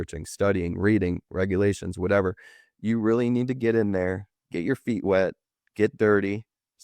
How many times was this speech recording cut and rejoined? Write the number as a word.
zero